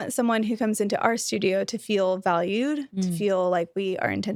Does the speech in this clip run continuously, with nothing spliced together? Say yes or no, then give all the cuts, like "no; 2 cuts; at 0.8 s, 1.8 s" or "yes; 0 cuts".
yes; 0 cuts